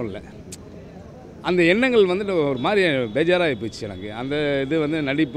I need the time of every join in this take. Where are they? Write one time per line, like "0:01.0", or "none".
none